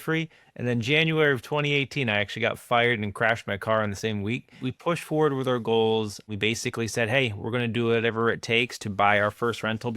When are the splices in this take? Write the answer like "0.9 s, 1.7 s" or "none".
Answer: 4.7 s, 6.3 s